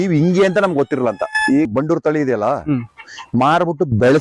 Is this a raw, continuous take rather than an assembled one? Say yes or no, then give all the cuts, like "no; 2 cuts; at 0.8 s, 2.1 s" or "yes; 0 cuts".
no; 1 cut; at 1.7 s